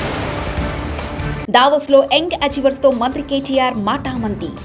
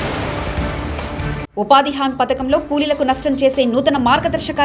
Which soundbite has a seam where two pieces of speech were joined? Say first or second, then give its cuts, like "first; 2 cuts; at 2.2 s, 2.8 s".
first; 1 cut; at 1.4 s